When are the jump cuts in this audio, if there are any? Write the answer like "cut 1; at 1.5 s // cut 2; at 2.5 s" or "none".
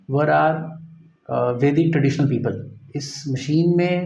none